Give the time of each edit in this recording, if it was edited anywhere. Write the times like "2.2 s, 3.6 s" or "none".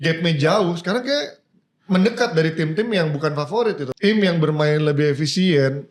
3.9 s